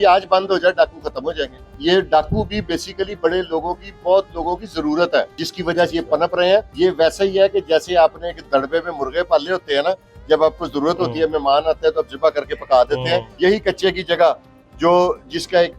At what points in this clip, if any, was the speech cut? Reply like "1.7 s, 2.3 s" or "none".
1.6 s, 5.4 s, 6.7 s, 13.3 s